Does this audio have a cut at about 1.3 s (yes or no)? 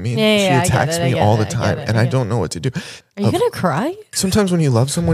no